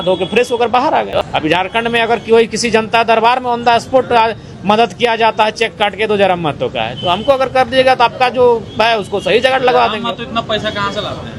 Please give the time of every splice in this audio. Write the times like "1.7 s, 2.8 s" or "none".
1.2 s